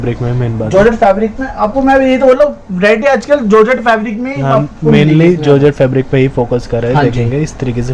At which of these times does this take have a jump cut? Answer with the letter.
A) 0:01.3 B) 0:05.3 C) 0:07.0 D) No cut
D